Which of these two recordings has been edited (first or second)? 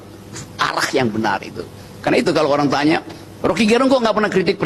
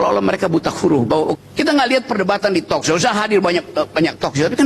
second